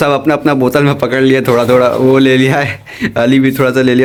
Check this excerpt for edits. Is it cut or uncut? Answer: uncut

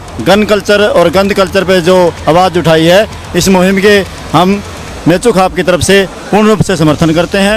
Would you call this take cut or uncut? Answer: uncut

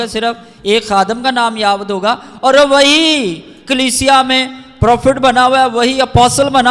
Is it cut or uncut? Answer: uncut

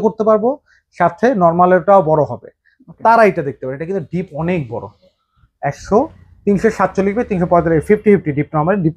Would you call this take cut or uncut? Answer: uncut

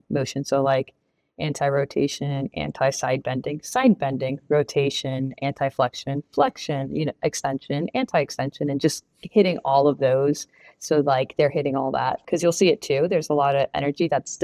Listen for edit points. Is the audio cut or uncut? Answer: uncut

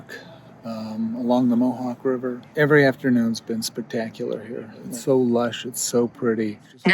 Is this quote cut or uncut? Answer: cut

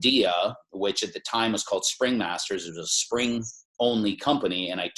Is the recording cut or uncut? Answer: uncut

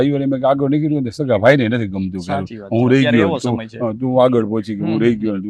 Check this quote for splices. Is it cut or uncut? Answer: uncut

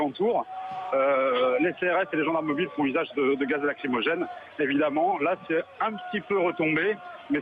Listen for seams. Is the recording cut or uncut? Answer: uncut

